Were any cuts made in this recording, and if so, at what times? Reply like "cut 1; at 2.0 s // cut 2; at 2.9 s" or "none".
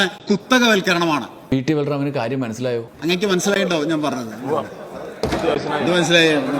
none